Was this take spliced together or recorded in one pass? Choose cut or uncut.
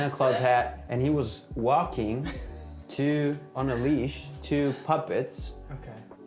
uncut